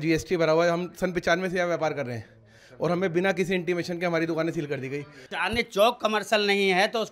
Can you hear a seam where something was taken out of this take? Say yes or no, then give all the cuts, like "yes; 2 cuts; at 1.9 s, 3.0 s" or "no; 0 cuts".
yes; 1 cut; at 5.4 s